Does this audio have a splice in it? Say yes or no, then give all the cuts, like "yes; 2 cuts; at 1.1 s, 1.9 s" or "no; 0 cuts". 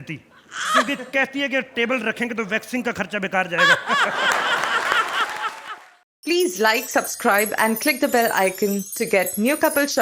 yes; 1 cut; at 5.6 s